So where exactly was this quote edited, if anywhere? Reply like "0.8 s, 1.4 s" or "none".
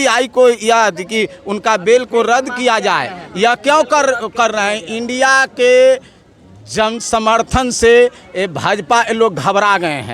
none